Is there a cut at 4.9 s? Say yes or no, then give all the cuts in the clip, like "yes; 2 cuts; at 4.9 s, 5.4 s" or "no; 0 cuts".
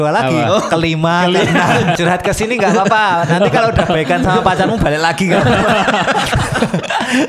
no; 1 cut; at 2.0 s